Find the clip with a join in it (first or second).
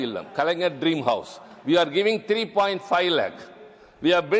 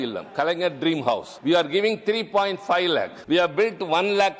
second